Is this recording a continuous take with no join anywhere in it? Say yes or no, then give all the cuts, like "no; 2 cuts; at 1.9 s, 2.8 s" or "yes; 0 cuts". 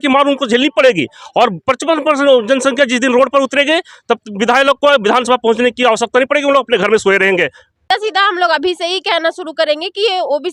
no; 1 cut; at 7.7 s